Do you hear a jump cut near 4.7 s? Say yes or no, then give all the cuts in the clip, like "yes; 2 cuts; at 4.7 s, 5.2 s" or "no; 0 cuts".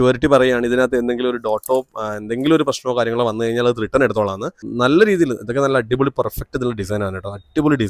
yes; 1 cut; at 4.7 s